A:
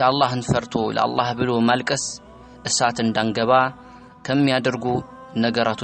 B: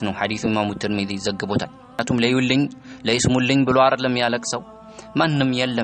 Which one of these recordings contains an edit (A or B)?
B